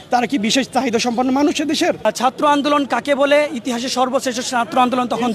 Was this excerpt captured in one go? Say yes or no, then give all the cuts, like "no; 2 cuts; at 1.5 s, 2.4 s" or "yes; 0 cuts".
no; 1 cut; at 2.0 s